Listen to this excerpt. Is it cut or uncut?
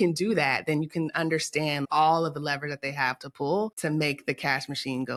uncut